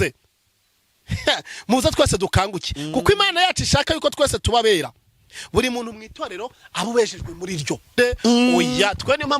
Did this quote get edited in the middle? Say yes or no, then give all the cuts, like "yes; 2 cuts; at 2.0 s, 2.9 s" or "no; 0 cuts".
yes; 1 cut; at 8.0 s